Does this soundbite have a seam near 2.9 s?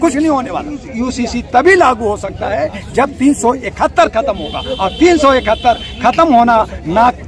no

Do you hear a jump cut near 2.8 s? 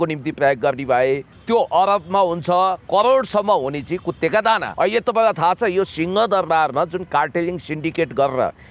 no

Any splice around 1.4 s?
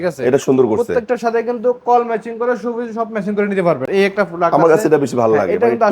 no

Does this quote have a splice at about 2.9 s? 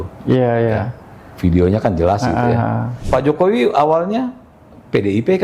yes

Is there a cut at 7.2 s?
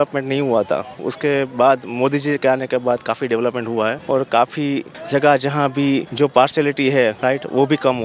yes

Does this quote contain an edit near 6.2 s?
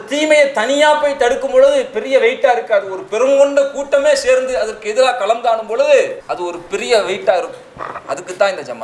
yes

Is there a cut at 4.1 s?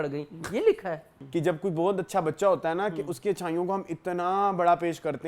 no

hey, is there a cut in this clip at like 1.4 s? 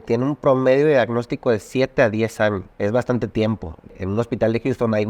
no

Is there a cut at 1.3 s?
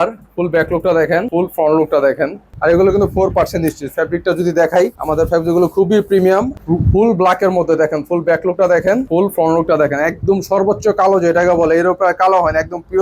yes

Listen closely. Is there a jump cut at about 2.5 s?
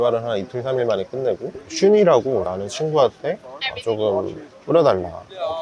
yes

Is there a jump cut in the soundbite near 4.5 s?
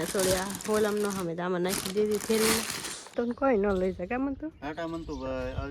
no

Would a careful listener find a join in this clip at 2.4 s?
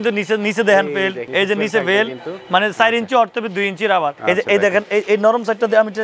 no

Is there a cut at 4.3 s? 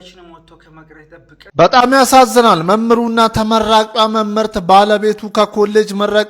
no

